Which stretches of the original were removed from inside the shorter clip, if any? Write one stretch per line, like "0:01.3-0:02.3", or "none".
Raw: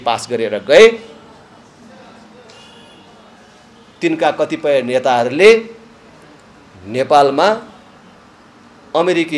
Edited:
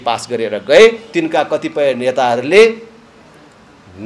0:01.0-0:03.9

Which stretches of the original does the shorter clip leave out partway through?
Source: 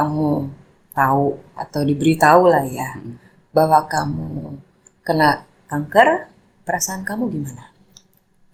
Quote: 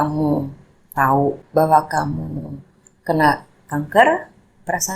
0:01.4-0:03.4

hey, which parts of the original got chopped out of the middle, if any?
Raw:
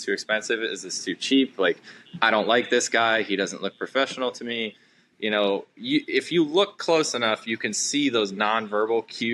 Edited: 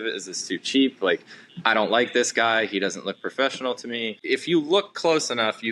0:04.8-0:06.1

